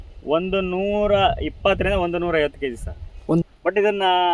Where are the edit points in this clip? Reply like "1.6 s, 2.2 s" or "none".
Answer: 3.4 s